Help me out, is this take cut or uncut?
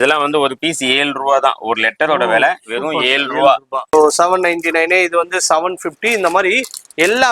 cut